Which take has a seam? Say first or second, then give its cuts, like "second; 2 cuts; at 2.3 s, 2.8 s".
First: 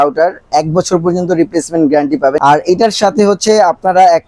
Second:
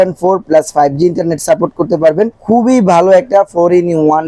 first; 1 cut; at 2.4 s